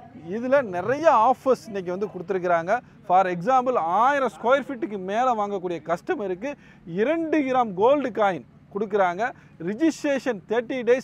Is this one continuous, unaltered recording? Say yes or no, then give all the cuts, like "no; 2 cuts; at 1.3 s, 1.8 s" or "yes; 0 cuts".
yes; 0 cuts